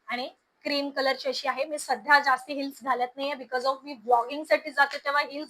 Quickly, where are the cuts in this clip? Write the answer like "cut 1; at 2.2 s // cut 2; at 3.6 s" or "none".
none